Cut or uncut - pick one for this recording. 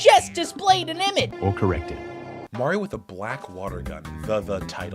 cut